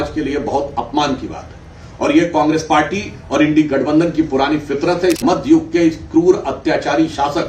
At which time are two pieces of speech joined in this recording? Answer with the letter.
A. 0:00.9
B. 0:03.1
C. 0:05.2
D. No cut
C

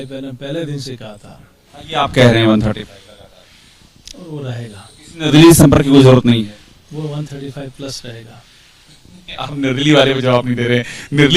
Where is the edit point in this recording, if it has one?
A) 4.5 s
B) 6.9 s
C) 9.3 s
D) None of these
D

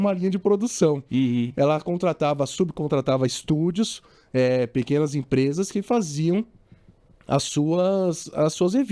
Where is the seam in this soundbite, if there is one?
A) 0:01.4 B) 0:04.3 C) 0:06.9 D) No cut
D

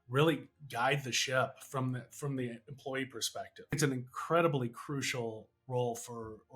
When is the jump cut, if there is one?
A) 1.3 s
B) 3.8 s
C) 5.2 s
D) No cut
B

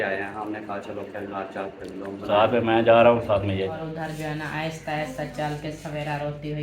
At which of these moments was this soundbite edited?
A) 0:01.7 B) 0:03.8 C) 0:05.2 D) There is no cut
B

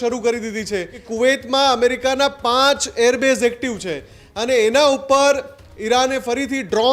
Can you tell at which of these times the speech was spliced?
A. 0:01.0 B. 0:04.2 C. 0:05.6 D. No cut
A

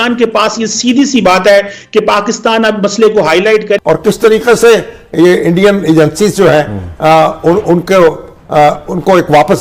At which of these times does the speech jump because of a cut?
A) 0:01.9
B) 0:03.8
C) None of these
B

